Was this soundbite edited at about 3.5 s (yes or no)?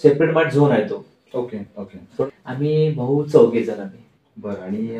no